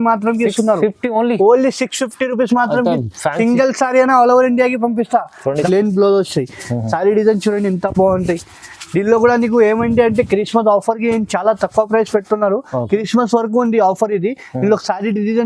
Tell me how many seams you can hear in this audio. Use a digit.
1